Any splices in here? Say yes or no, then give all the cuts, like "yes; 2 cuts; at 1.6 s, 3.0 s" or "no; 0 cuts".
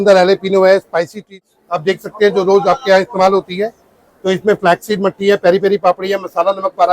yes; 1 cut; at 1.4 s